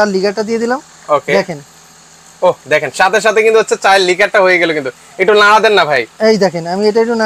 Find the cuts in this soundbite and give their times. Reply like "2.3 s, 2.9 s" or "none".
none